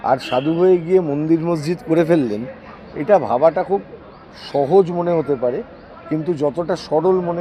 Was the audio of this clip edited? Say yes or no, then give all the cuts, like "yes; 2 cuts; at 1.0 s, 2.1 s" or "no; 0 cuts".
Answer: no; 0 cuts